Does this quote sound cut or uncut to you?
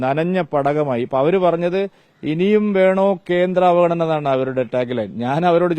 uncut